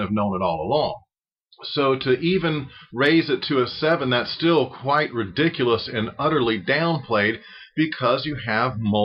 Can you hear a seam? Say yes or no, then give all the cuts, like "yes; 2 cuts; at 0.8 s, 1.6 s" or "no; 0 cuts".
no; 0 cuts